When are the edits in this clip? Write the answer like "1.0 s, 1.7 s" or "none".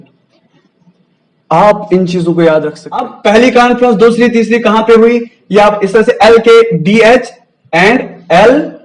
3.1 s